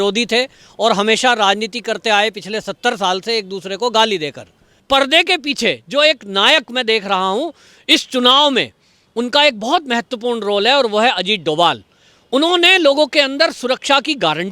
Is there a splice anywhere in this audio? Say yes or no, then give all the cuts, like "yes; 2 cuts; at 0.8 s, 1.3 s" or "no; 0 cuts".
yes; 1 cut; at 4.8 s